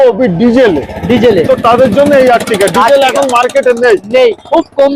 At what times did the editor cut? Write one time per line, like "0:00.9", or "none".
none